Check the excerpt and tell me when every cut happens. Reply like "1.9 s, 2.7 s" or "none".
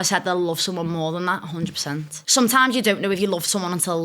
2.1 s